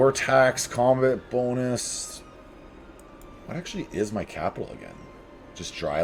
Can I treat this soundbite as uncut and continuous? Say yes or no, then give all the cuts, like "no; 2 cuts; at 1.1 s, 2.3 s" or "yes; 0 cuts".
yes; 0 cuts